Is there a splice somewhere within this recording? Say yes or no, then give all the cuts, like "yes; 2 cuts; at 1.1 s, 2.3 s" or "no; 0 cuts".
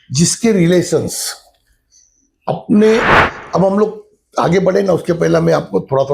yes; 1 cut; at 3.1 s